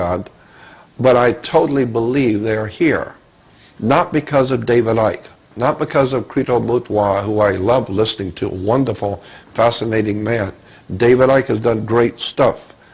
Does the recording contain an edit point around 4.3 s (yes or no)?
no